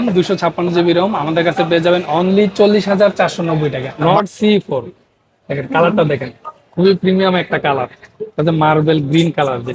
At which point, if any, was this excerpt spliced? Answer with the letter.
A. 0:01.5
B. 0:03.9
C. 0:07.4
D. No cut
B